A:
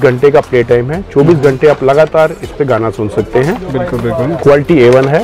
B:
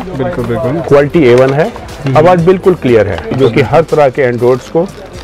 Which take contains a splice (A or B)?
B